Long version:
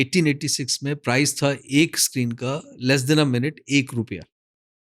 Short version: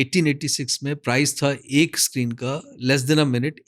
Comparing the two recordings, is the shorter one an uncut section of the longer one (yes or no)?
yes